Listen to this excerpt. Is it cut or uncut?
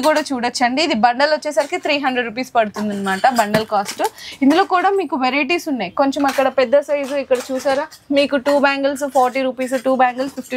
uncut